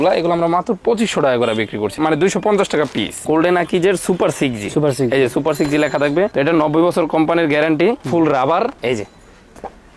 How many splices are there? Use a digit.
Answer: 3